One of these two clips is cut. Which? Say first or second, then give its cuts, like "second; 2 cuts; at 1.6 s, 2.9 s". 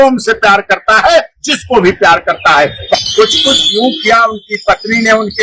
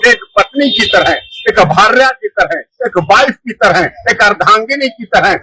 first; 1 cut; at 2.9 s